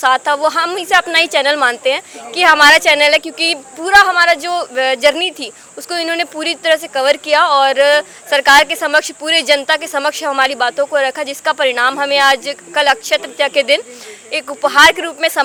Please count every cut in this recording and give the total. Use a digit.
0